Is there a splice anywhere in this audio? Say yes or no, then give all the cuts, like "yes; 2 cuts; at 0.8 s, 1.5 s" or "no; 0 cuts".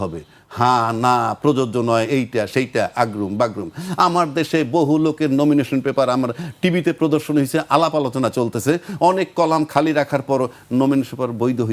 no; 0 cuts